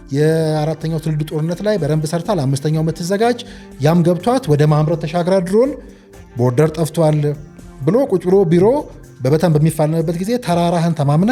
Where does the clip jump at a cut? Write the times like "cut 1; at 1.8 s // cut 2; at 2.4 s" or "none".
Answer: none